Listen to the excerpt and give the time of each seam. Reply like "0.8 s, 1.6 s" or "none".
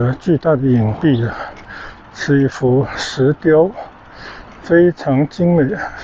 none